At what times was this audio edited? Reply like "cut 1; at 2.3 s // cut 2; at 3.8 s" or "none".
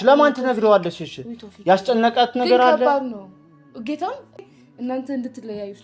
cut 1; at 4.4 s